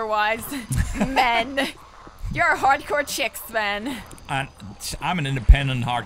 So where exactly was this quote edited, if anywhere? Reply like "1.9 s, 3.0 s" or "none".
none

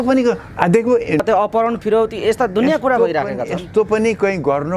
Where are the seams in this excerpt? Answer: 1.2 s

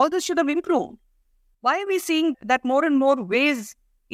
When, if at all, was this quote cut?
none

